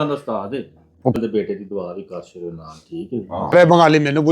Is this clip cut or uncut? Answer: cut